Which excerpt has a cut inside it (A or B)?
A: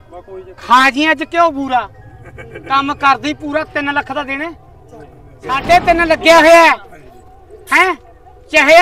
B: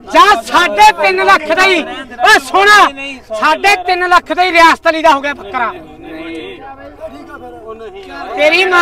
A